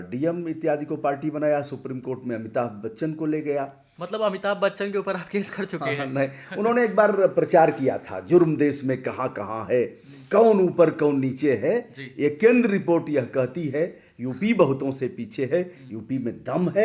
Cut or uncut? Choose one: uncut